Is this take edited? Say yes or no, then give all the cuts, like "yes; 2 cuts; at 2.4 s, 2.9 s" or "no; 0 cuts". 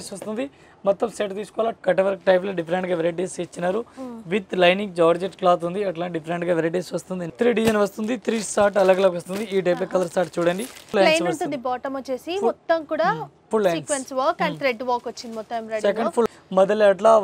yes; 4 cuts; at 1.8 s, 7.3 s, 10.9 s, 16.3 s